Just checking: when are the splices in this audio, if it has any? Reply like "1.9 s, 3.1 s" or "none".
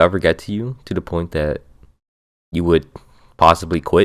none